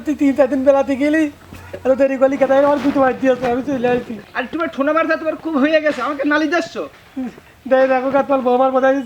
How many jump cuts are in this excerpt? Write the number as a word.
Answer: one